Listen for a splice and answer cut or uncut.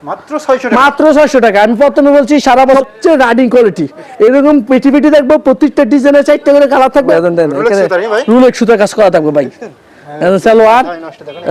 cut